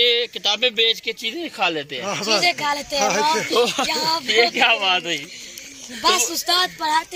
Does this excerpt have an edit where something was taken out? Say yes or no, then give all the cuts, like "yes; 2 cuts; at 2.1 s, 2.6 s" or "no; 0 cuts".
no; 0 cuts